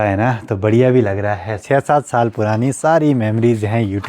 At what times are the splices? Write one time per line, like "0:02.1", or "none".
0:01.6